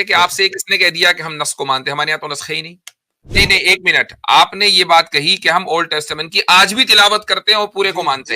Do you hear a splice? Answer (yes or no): yes